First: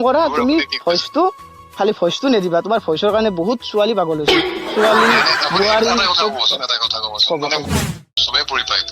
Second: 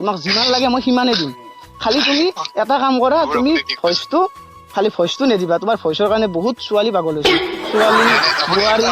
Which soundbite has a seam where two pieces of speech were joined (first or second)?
first